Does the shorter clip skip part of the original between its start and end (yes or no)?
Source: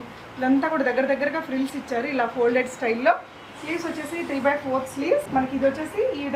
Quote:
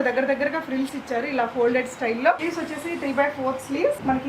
yes